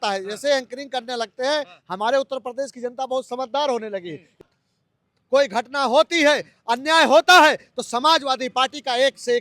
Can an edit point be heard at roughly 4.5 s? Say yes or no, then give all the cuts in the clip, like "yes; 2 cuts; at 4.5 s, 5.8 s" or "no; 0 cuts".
yes; 1 cut; at 4.5 s